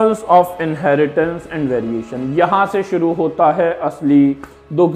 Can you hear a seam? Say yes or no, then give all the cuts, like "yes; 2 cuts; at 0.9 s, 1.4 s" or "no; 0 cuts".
no; 0 cuts